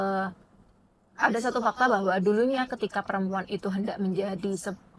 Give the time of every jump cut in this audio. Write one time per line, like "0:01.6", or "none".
none